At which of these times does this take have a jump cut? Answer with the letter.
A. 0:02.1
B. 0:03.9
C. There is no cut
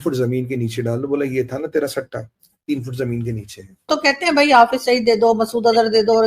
B